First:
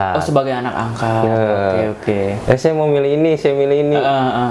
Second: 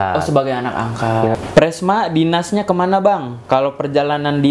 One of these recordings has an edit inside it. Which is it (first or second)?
second